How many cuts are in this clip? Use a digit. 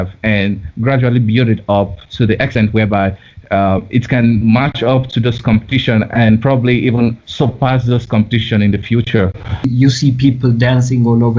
1